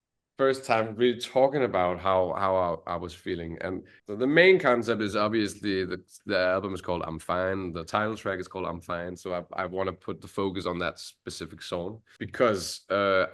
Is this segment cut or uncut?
cut